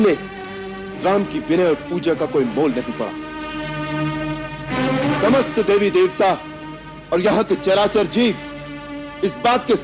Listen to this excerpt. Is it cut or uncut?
uncut